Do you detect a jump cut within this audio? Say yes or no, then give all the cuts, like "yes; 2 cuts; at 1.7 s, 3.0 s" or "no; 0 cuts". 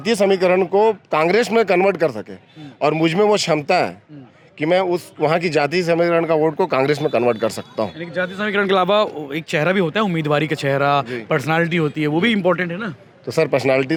no; 0 cuts